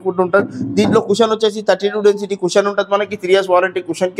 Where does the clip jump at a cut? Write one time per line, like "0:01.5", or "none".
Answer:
none